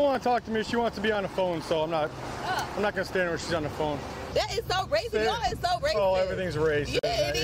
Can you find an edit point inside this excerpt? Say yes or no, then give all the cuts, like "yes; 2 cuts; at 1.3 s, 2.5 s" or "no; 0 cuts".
yes; 1 cut; at 4.2 s